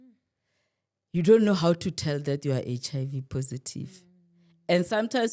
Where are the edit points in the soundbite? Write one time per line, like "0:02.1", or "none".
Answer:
none